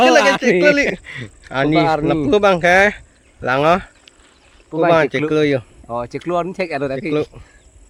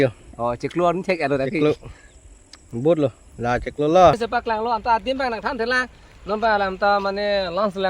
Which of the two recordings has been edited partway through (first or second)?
second